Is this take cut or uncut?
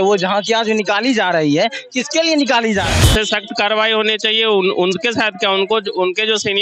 cut